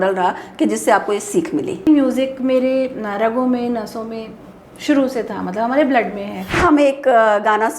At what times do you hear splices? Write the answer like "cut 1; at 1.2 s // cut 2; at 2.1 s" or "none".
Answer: cut 1; at 1.9 s // cut 2; at 6.6 s